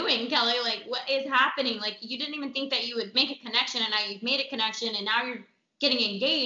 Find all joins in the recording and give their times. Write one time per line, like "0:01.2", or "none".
none